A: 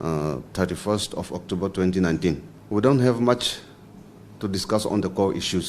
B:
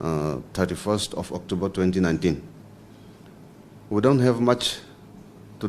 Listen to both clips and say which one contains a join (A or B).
A